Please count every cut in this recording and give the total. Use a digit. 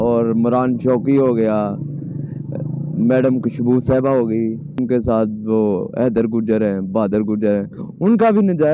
1